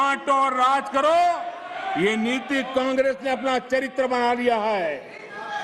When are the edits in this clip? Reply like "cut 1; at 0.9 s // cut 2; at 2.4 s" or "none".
none